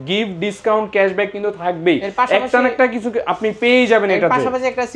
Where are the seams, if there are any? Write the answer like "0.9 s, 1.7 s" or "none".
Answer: none